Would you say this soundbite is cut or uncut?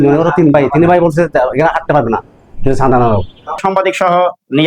cut